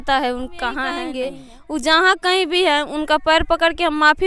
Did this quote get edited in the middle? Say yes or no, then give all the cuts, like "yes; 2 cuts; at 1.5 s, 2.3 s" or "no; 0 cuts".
yes; 1 cut; at 1.1 s